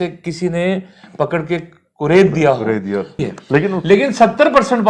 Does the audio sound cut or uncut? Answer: cut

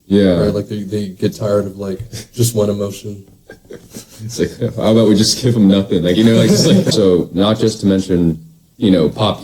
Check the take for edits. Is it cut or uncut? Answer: cut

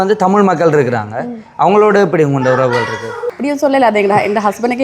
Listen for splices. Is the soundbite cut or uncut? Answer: cut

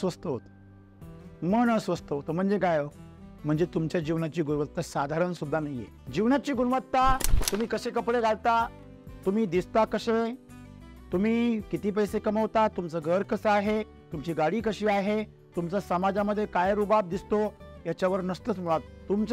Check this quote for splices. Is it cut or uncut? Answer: uncut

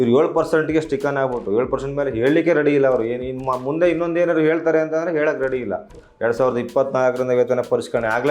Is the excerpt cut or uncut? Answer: cut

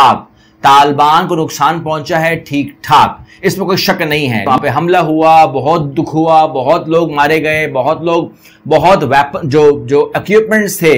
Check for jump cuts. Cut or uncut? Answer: cut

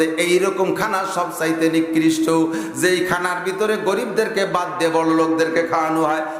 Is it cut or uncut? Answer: uncut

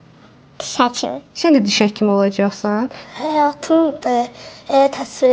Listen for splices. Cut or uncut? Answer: cut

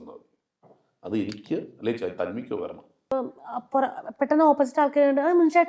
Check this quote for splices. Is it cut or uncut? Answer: cut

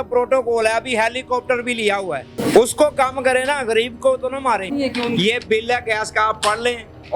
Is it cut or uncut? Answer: cut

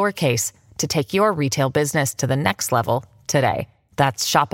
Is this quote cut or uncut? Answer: uncut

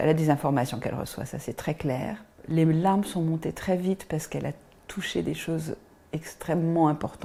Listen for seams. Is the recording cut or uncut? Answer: uncut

